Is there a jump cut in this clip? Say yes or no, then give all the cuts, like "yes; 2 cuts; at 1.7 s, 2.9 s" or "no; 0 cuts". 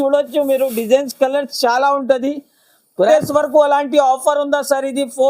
yes; 1 cut; at 3.0 s